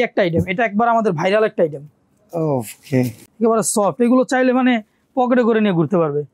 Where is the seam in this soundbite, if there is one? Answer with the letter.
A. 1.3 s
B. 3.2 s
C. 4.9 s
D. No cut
B